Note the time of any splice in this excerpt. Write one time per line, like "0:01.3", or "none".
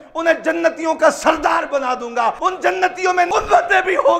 0:02.4